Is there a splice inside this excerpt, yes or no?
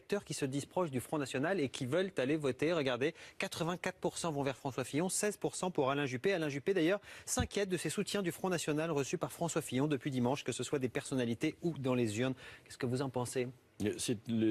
no